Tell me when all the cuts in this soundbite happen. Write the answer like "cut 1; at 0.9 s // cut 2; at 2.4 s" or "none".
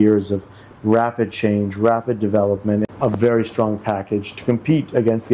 cut 1; at 2.8 s